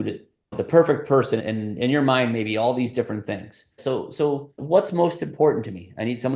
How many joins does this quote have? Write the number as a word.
one